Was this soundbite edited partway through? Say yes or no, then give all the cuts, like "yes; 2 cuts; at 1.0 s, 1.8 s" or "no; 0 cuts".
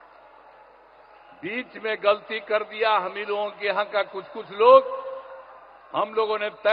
no; 0 cuts